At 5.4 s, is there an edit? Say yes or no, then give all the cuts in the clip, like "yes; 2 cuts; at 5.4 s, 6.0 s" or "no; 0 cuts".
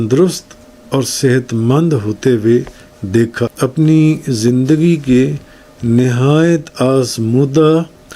no; 1 cut; at 3.5 s